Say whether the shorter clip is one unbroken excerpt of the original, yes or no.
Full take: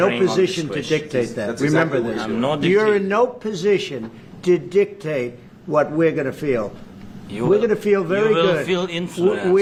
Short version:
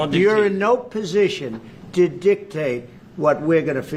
yes